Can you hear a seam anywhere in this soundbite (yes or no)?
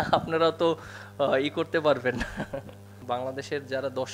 yes